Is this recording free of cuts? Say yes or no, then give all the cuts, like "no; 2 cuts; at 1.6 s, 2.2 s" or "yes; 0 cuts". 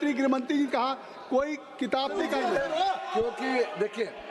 no; 1 cut; at 2.1 s